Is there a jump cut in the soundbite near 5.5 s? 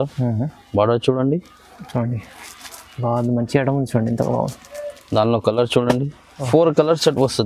no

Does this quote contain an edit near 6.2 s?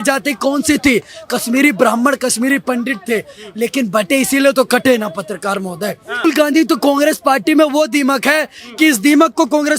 yes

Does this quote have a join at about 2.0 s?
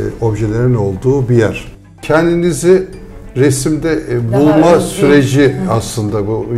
yes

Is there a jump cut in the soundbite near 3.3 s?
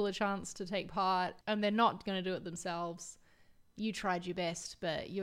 no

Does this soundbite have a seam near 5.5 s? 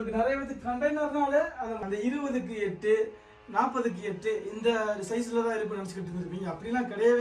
no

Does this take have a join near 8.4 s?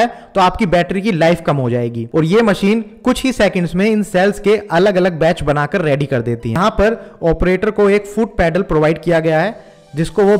no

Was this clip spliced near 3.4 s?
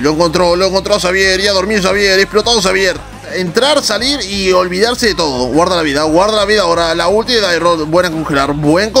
yes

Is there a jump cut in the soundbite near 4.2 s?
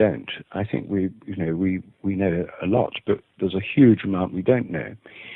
no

